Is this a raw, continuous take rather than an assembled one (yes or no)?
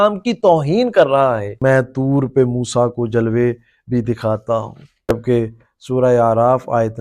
no